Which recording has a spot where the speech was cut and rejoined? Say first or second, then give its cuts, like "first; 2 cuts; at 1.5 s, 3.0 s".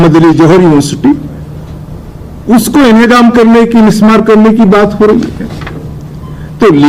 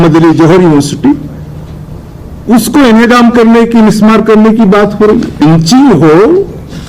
second; 1 cut; at 5.4 s